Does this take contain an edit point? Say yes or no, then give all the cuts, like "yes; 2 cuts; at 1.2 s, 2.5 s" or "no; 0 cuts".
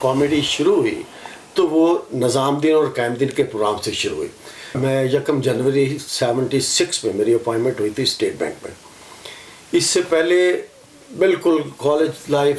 yes; 1 cut; at 4.8 s